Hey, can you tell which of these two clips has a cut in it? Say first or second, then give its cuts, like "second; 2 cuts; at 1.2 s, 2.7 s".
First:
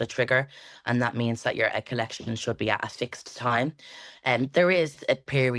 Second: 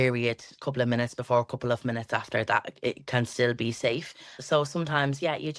second; 1 cut; at 4.3 s